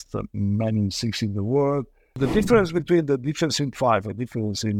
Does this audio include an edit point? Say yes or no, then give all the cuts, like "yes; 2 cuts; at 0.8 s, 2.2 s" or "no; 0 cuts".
yes; 1 cut; at 2.2 s